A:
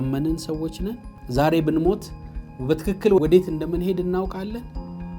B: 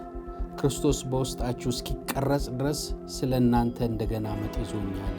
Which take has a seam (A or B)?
A